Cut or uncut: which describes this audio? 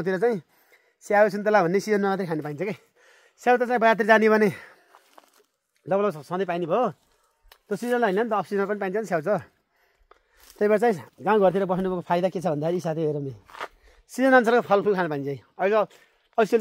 uncut